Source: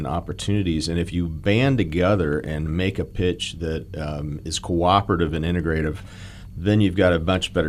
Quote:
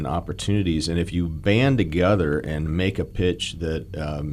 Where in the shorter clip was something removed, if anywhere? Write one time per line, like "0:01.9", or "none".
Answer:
none